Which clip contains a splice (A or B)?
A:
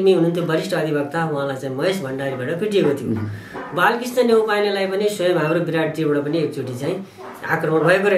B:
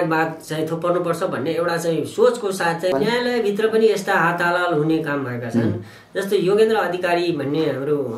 B